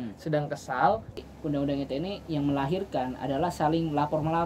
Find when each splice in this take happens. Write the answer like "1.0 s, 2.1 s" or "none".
1.2 s